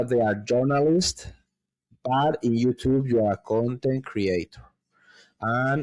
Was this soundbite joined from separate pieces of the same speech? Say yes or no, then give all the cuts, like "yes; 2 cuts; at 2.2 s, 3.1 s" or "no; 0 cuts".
no; 0 cuts